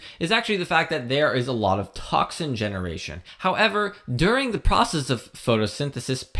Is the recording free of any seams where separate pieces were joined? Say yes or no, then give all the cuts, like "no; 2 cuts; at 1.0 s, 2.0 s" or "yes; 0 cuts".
no; 1 cut; at 3.3 s